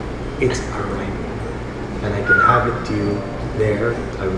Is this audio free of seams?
yes; 0 cuts

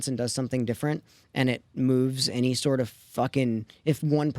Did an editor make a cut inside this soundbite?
yes; 1 cut; at 1.7 s

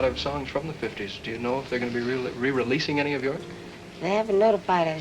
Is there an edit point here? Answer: no; 0 cuts

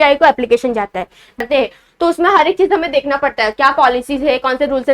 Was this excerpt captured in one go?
no; 1 cut; at 1.4 s

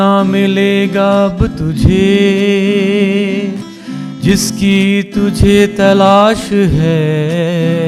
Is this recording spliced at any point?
no; 0 cuts

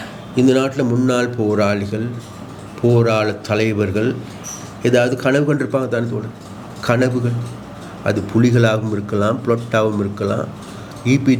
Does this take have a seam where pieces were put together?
no; 0 cuts

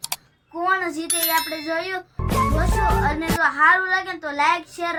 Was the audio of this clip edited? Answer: no; 0 cuts

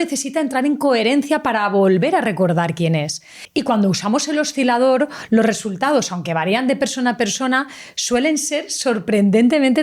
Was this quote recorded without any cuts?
yes; 0 cuts

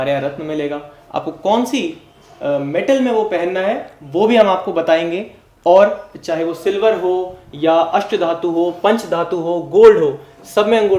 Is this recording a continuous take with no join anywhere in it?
yes; 0 cuts

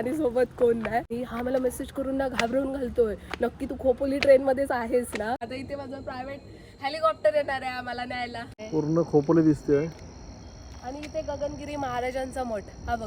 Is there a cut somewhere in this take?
yes; 3 cuts; at 1.1 s, 5.4 s, 8.5 s

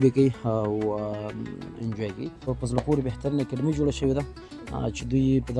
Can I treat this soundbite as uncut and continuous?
no; 1 cut; at 2.5 s

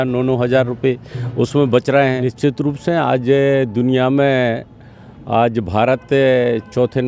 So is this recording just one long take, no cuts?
no; 1 cut; at 2.3 s

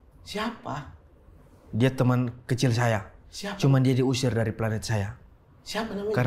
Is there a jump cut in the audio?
no; 0 cuts

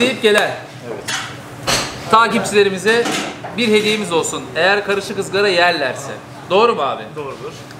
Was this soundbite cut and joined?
no; 0 cuts

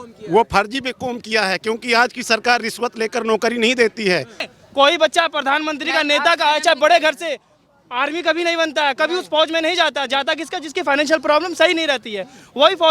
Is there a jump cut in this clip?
yes; 1 cut; at 4.4 s

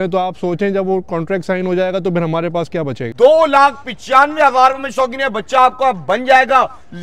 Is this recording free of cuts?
no; 1 cut; at 3.1 s

